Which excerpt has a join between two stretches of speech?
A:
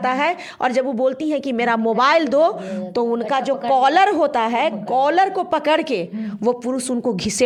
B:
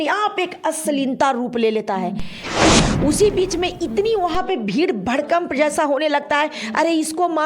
B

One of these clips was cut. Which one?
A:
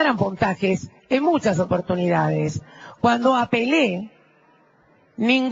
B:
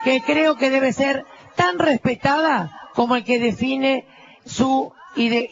B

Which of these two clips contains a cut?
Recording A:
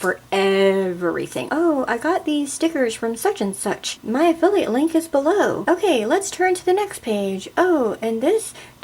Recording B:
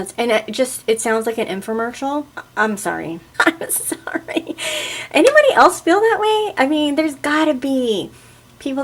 A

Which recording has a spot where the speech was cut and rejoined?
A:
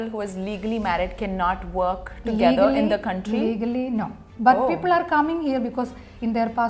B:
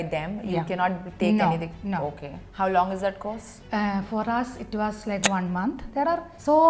B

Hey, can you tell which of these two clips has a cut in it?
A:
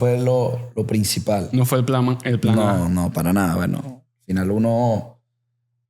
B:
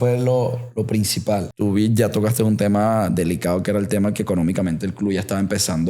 B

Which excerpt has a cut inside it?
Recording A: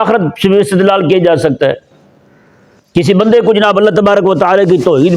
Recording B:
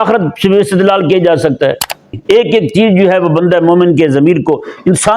B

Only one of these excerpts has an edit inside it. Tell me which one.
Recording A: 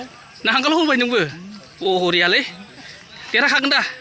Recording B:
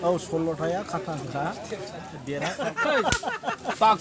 B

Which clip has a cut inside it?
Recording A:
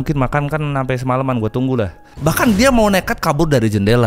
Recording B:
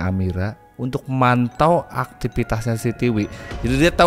A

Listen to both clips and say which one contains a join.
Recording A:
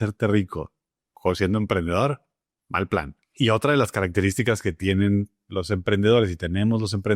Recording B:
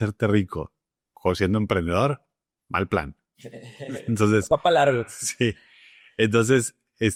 A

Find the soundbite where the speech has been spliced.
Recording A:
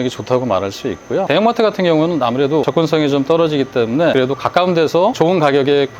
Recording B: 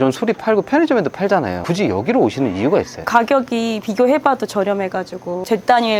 A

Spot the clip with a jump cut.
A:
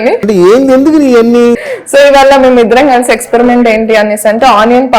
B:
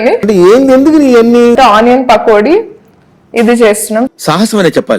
B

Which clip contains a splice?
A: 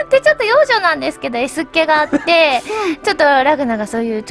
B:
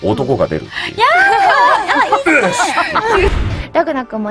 B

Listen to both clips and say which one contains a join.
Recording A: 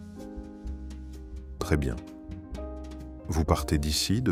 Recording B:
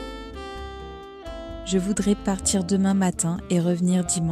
B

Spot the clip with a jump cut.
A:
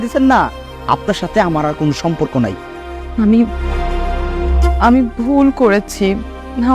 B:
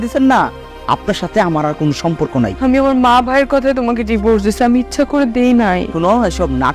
B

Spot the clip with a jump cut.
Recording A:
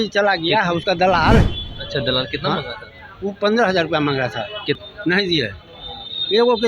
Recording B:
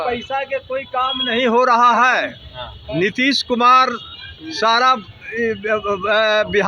A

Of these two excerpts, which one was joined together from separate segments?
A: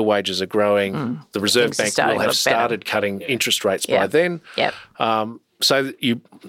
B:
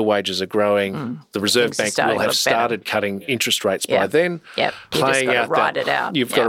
B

